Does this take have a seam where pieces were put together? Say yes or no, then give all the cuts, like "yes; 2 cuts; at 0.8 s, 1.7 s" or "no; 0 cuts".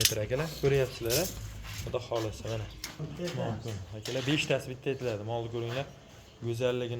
yes; 1 cut; at 3.1 s